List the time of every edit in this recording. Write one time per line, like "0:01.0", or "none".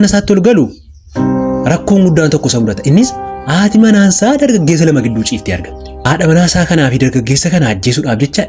0:05.9